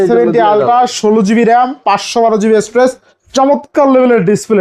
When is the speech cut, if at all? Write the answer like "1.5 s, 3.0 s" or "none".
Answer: none